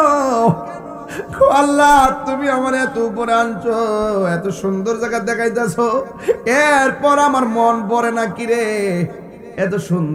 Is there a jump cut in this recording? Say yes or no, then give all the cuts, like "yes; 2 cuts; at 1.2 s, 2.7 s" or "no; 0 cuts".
no; 0 cuts